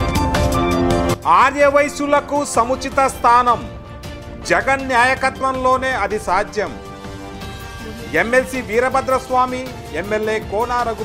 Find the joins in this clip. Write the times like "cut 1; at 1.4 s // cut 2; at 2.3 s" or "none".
cut 1; at 1.1 s